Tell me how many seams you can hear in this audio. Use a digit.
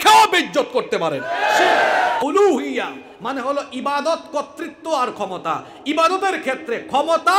1